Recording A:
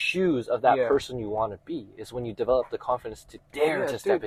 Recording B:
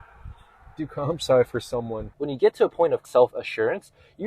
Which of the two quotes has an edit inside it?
B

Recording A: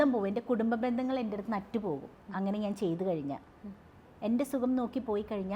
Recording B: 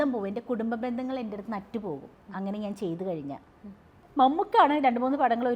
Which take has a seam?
B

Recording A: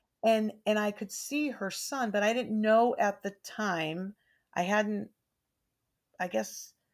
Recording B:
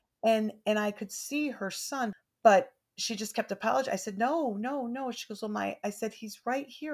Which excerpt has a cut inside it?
B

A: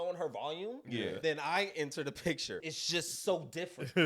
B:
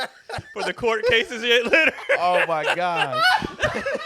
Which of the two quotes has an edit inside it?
A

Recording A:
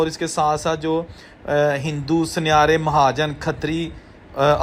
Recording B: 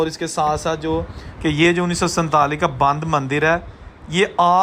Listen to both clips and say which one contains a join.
B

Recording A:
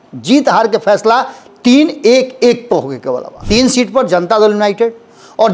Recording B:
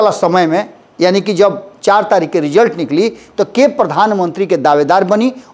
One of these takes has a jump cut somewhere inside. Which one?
A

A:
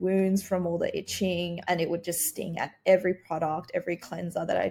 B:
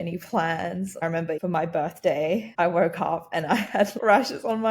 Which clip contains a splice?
B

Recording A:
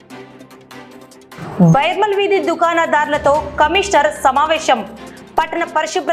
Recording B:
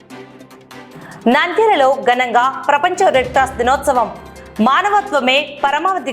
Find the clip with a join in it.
B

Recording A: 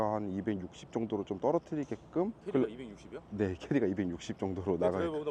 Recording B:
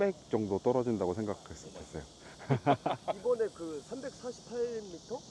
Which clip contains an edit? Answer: A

